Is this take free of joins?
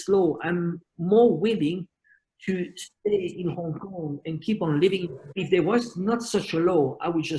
yes; 0 cuts

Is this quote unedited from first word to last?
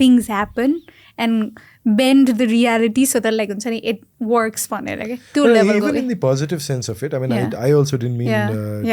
yes; 0 cuts

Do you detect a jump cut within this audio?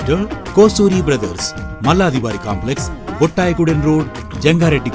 no; 0 cuts

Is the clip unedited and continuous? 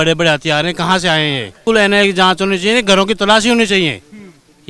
no; 1 cut; at 1.6 s

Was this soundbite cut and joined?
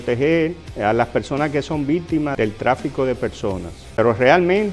yes; 1 cut; at 3.8 s

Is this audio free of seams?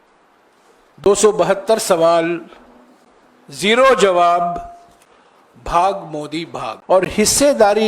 no; 1 cut; at 6.7 s

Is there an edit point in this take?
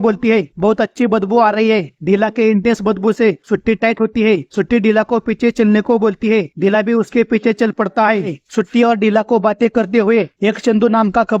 yes; 1 cut; at 8.4 s

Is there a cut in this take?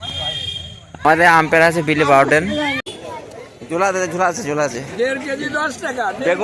yes; 1 cut; at 2.8 s

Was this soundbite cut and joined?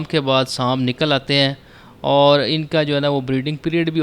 no; 0 cuts

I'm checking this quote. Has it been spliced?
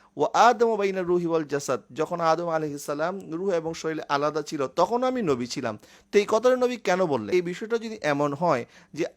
yes; 1 cut; at 7.3 s

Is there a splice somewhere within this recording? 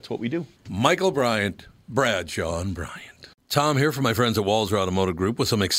yes; 1 cut; at 3.4 s

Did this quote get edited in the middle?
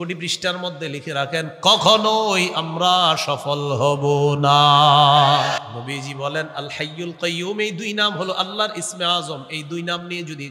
yes; 1 cut; at 5.6 s

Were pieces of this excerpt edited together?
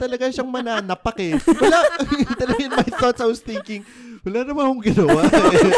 no; 0 cuts

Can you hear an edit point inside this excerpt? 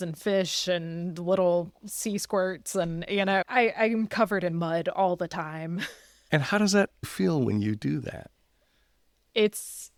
no; 0 cuts

